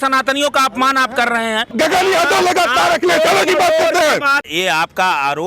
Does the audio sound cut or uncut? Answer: cut